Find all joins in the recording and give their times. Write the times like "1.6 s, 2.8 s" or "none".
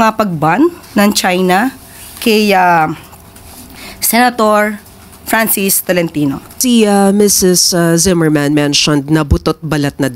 6.5 s